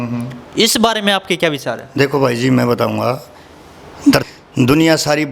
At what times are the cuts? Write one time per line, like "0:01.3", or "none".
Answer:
0:04.2